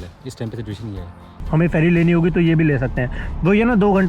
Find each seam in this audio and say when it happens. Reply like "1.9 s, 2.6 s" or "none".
1.4 s